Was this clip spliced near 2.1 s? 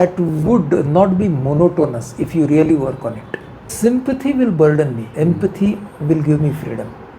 no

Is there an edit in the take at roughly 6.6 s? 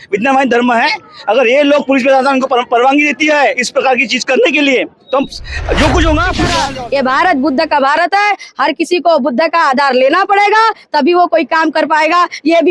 yes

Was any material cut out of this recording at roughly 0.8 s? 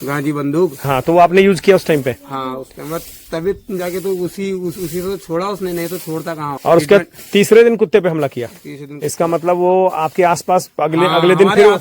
yes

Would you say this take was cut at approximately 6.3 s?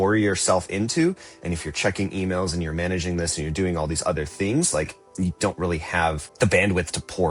yes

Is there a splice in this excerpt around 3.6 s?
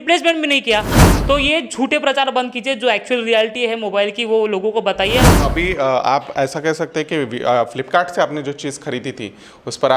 no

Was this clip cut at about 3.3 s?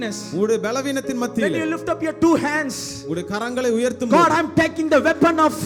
no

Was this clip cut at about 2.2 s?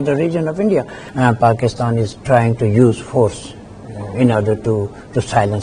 no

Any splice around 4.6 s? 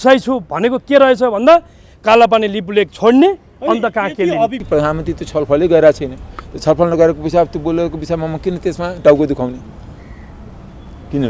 yes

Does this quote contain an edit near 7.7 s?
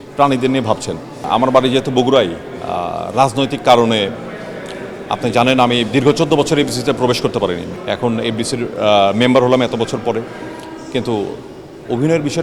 yes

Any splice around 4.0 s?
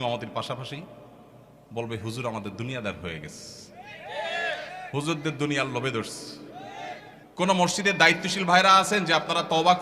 no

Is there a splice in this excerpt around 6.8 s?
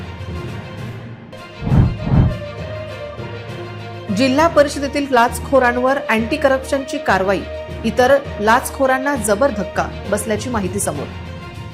no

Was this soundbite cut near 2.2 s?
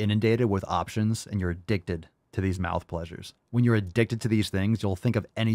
yes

